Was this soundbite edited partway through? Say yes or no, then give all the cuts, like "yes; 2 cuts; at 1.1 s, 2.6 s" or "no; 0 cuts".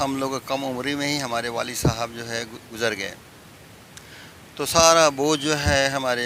no; 0 cuts